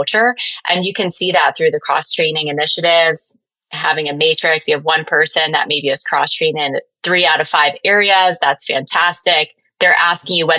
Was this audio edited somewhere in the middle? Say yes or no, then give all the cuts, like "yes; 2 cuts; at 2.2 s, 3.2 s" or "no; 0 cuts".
yes; 1 cut; at 6.9 s